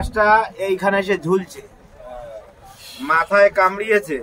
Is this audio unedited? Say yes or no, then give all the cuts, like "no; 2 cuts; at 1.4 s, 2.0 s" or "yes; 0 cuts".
yes; 0 cuts